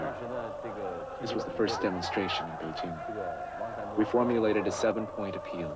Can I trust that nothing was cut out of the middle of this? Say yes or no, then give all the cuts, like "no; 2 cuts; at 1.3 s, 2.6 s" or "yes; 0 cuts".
no; 1 cut; at 1.3 s